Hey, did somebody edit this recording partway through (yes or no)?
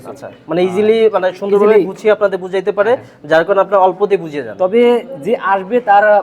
no